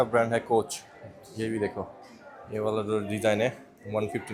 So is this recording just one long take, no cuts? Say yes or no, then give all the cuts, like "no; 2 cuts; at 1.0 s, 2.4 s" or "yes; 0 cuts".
yes; 0 cuts